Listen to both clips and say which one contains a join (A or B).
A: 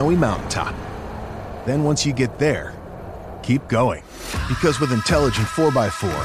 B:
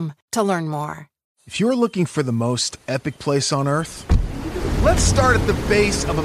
B